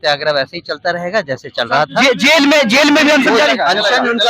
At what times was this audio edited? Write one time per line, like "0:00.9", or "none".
none